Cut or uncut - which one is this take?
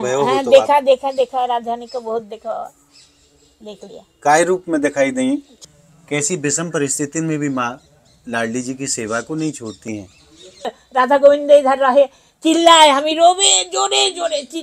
cut